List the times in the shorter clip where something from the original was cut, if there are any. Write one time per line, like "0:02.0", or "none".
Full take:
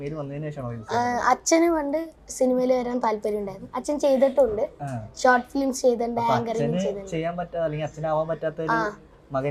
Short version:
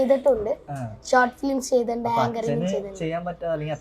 none